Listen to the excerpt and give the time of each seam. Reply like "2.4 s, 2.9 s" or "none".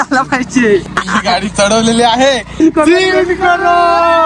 0.9 s, 2.6 s